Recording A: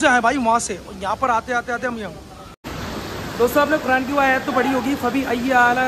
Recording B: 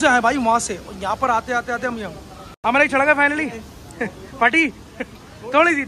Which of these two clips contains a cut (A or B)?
A